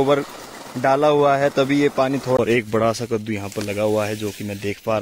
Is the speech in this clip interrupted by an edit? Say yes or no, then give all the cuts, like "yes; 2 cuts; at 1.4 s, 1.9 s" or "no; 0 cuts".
yes; 1 cut; at 2.4 s